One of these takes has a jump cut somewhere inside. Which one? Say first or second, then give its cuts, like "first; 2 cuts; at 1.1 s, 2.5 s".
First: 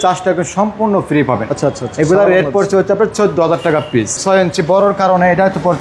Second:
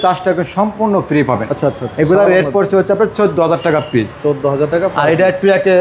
first; 1 cut; at 4.2 s